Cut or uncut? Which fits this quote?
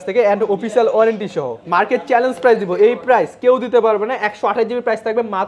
cut